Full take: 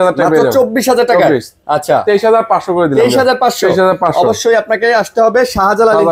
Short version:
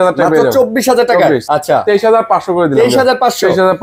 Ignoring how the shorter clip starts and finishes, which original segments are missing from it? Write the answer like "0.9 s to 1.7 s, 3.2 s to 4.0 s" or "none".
1.4 s to 1.6 s